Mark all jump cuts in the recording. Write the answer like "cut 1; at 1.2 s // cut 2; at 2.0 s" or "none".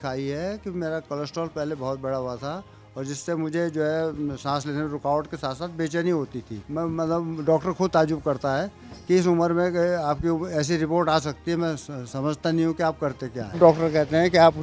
cut 1; at 6.6 s // cut 2; at 13.6 s